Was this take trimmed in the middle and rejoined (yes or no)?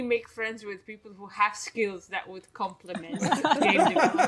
no